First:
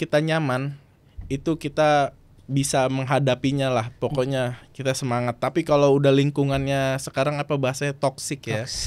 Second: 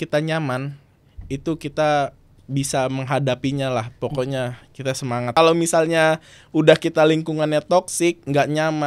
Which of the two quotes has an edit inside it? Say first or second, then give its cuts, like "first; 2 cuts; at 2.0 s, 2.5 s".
second; 1 cut; at 5.3 s